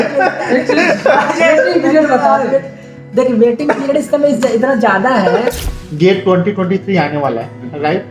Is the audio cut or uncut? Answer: cut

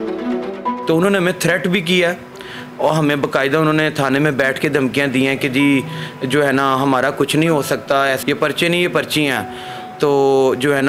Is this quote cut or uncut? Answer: cut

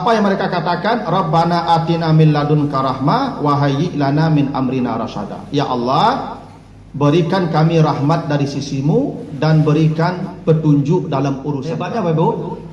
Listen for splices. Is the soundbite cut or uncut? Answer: cut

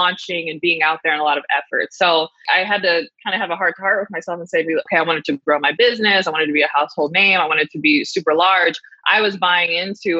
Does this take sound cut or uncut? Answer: cut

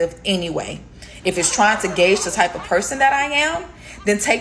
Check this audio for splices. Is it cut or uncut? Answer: cut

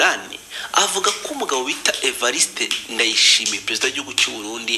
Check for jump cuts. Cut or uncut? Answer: uncut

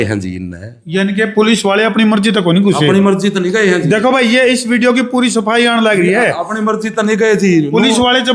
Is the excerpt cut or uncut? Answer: uncut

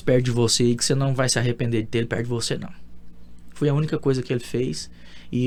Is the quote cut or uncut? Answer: uncut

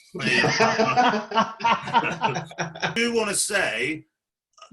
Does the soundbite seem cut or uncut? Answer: cut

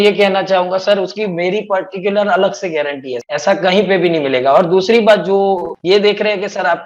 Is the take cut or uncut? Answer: uncut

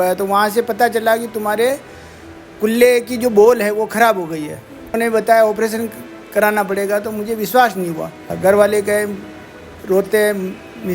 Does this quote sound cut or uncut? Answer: cut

